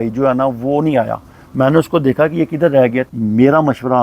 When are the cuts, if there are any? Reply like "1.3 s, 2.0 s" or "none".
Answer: 3.1 s